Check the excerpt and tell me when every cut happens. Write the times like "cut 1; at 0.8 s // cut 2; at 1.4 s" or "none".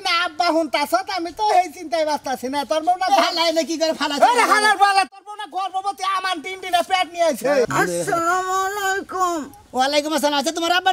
cut 1; at 7.7 s